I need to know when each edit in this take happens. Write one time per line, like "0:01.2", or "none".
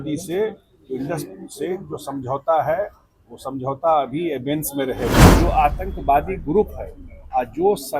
0:05.2